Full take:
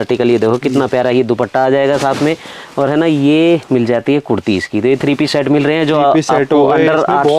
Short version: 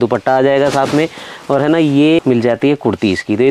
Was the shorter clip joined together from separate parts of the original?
yes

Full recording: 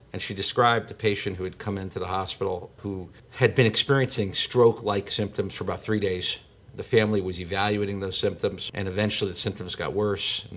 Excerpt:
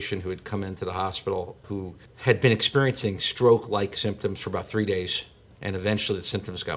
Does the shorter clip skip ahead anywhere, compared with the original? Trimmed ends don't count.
yes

